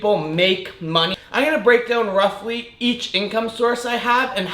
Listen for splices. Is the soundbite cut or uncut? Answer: cut